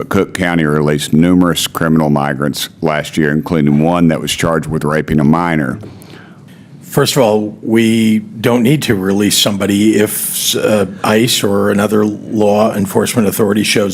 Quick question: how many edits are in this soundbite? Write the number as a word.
one